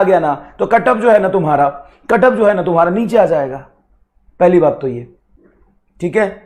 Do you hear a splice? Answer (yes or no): no